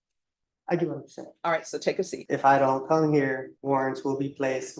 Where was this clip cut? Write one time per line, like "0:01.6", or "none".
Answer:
0:02.2
0:03.5